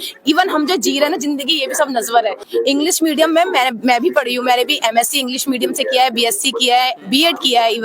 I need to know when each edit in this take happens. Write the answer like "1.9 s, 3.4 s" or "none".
2.4 s